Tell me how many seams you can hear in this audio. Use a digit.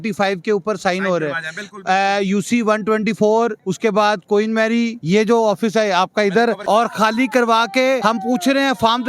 4